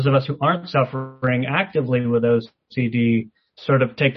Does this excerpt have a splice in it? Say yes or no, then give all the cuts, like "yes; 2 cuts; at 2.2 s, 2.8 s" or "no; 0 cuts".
no; 0 cuts